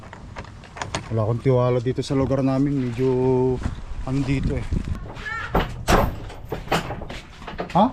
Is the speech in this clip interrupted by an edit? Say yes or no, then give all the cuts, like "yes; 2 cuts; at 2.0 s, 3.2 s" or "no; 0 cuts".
yes; 1 cut; at 5.0 s